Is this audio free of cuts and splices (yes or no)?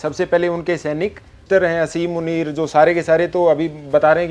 no